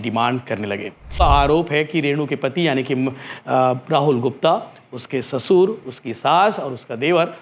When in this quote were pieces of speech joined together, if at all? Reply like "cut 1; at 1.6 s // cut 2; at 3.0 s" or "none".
cut 1; at 1.2 s